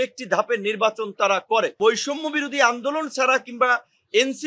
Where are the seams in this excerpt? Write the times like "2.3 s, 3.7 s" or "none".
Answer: 1.8 s